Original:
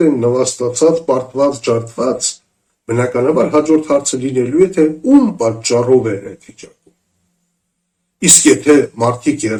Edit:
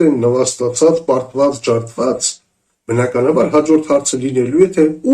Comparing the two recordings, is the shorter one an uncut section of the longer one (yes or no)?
yes